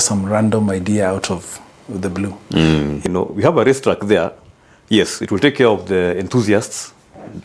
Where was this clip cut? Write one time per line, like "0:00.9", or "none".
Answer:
0:03.0